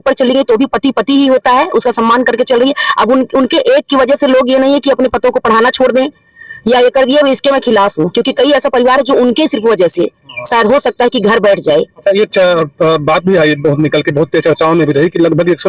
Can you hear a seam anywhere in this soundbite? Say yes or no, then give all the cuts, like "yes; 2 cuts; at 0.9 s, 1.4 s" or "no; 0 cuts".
no; 0 cuts